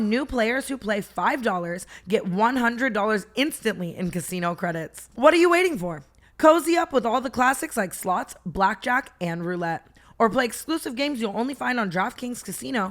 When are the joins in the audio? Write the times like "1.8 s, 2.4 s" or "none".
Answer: 5.0 s